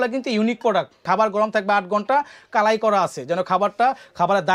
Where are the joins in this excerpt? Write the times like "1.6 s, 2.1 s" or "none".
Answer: 1.0 s